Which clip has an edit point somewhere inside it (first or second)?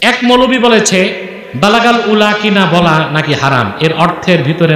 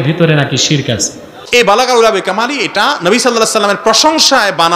second